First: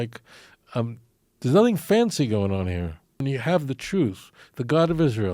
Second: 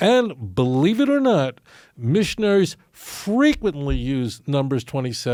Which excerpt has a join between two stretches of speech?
first; 1 cut; at 3.2 s

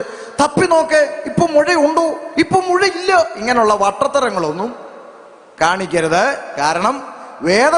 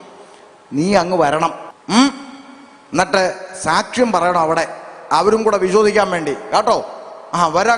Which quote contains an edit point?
second; 1 cut; at 1.7 s

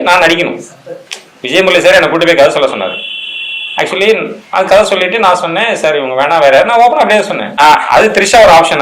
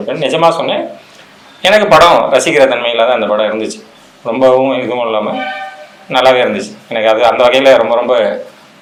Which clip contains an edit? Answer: first; 1 cut; at 7.6 s

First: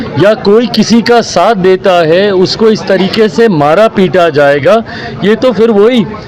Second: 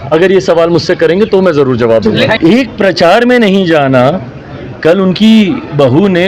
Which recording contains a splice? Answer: second; 1 cut; at 2.3 s

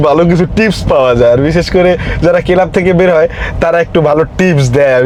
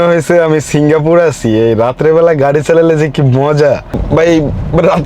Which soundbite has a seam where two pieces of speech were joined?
second; 1 cut; at 4.0 s

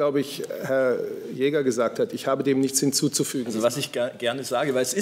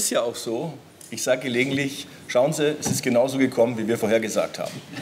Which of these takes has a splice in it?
first; 1 cut; at 3.4 s

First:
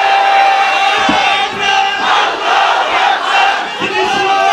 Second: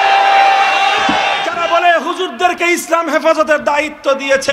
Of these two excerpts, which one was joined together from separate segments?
second; 1 cut; at 1.4 s

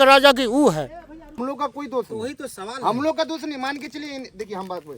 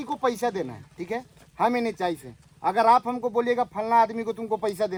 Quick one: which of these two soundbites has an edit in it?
first; 1 cut; at 1.4 s

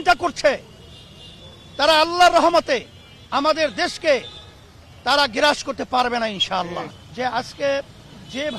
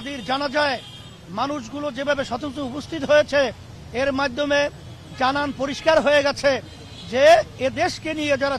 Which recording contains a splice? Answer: first; 1 cut; at 7.0 s

